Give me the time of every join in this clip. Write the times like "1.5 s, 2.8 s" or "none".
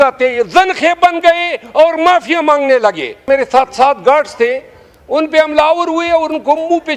3.2 s